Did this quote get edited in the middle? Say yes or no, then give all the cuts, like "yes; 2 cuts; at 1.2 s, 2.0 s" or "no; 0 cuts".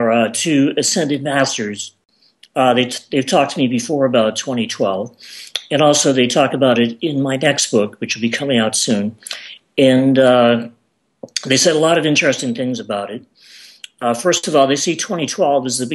no; 0 cuts